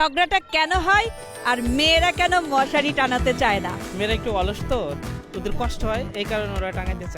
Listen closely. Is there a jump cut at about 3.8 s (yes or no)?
yes